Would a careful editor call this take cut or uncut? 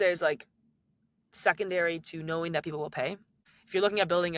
cut